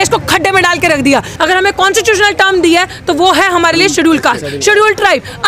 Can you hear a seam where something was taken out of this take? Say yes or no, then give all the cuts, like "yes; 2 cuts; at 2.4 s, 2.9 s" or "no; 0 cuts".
yes; 1 cut; at 1.3 s